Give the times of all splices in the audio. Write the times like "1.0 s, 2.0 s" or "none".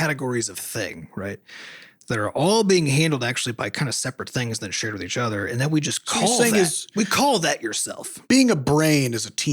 8.2 s